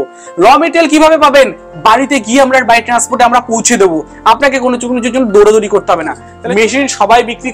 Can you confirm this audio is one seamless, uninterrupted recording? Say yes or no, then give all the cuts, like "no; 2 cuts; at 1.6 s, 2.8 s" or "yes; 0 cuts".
no; 1 cut; at 6.3 s